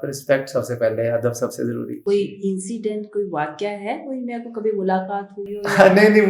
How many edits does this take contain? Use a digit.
1